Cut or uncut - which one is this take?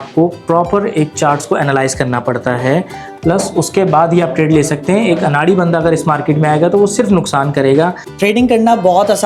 cut